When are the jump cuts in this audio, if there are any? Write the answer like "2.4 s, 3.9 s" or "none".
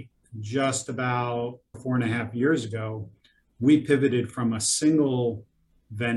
1.8 s

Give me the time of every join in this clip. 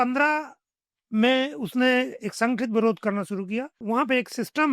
3.8 s

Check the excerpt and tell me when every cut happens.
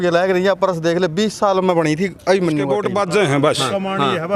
2.8 s

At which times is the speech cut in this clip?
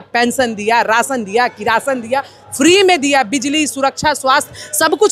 none

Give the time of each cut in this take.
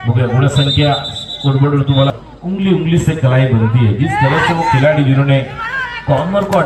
2.1 s

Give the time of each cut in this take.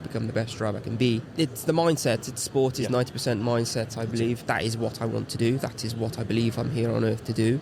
1.3 s, 4.4 s

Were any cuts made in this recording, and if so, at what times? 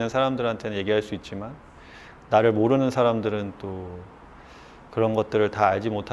none

